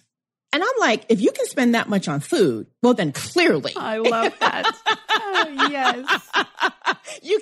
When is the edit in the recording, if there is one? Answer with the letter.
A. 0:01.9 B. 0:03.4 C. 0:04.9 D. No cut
D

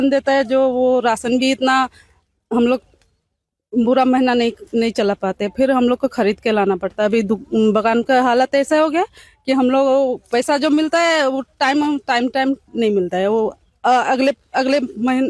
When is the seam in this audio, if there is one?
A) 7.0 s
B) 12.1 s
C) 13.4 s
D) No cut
D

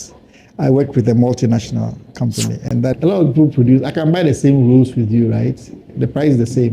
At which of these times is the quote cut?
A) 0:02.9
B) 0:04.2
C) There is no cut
A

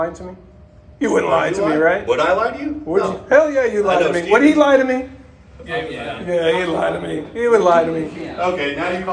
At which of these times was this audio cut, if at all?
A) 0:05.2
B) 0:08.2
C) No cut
C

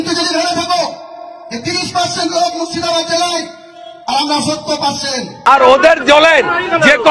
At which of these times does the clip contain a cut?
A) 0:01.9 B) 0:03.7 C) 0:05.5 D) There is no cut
C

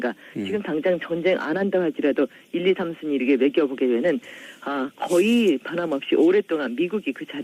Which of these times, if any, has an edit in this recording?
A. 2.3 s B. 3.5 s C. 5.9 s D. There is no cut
B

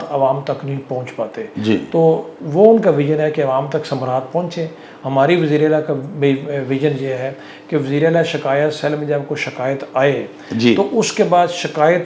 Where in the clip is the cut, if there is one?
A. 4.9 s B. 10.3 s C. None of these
A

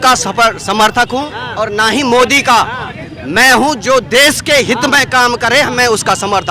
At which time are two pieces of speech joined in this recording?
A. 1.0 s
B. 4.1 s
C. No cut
C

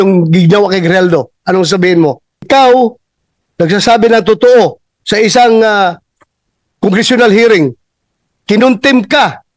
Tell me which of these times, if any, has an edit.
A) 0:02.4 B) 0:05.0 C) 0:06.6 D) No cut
A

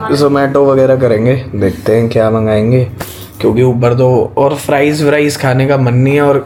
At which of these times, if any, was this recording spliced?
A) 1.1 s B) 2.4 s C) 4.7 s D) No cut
D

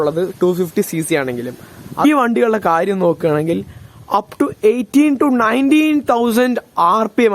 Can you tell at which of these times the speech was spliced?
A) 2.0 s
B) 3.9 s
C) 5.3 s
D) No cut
A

